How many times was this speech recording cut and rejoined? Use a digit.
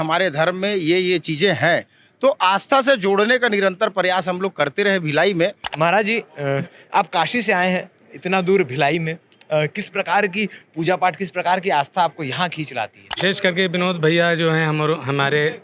2